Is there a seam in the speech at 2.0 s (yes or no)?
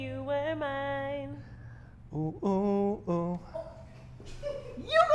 no